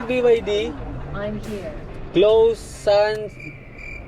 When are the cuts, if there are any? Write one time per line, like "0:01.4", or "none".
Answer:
0:00.9
0:02.0